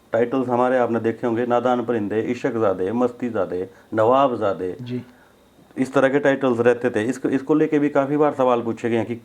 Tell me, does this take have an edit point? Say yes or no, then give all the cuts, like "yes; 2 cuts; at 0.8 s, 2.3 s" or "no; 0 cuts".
no; 0 cuts